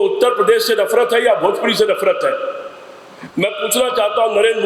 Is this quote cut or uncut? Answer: uncut